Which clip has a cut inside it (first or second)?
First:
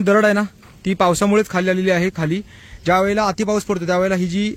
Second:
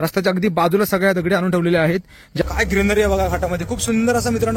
second